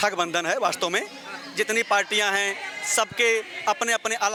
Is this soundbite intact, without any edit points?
yes; 0 cuts

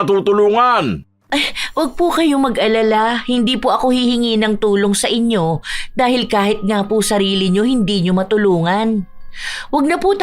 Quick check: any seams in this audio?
yes; 1 cut; at 1.1 s

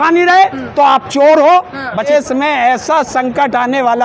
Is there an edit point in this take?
yes; 1 cut; at 2.1 s

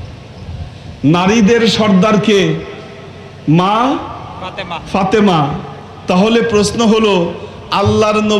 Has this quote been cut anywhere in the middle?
no; 0 cuts

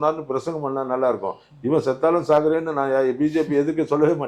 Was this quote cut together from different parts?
no; 0 cuts

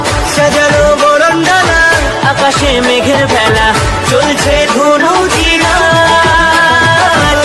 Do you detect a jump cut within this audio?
no; 0 cuts

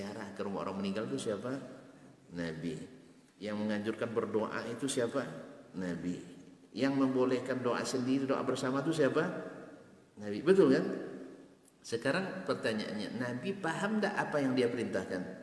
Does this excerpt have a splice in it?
yes; 1 cut; at 3.3 s

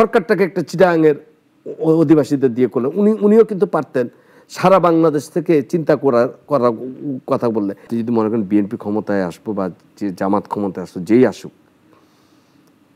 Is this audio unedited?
no; 1 cut; at 7.9 s

